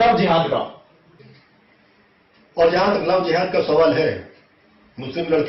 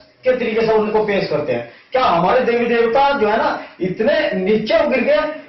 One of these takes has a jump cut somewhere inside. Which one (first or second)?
first